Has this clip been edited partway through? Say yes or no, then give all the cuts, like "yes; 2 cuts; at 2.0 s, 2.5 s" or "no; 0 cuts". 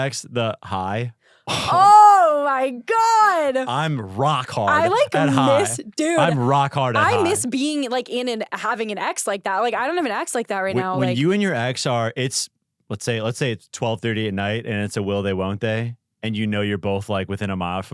no; 0 cuts